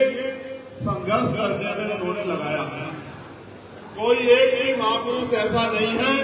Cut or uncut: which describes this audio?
cut